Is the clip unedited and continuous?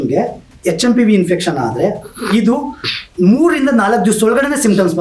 yes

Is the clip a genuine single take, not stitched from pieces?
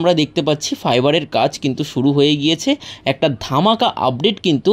yes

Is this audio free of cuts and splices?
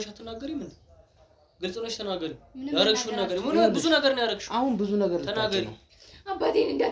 no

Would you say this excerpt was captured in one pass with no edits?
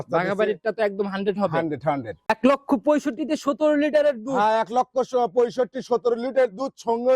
no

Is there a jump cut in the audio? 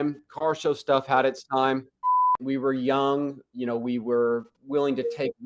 yes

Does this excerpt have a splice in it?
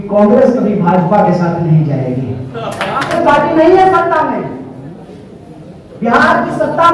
yes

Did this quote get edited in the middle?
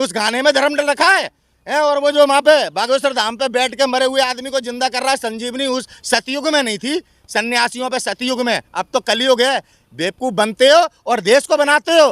no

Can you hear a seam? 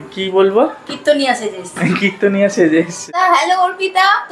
yes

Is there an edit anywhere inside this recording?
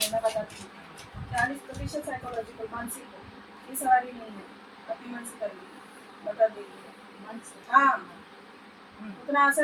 no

